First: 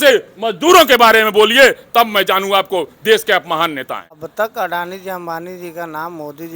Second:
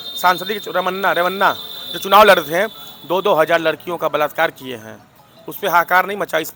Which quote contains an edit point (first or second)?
first